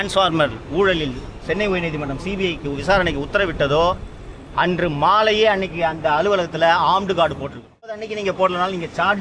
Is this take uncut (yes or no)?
no